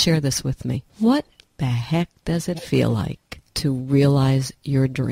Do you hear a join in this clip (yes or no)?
no